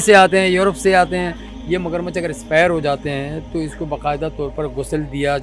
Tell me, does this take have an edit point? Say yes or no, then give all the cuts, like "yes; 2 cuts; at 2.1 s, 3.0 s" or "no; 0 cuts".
yes; 1 cut; at 1.4 s